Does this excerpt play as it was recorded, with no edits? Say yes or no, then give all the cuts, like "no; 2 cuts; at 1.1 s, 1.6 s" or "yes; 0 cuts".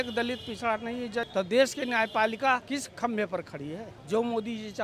no; 3 cuts; at 1.3 s, 2.6 s, 3.9 s